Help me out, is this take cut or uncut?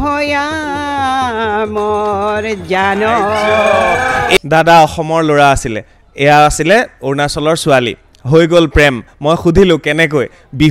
cut